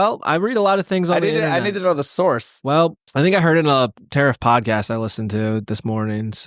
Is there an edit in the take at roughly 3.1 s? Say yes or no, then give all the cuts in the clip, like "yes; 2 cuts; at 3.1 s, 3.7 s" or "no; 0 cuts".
yes; 1 cut; at 3.1 s